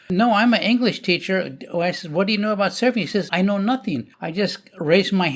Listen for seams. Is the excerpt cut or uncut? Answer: cut